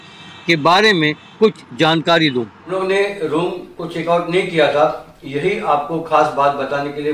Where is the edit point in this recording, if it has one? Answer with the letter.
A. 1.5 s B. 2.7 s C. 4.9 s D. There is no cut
B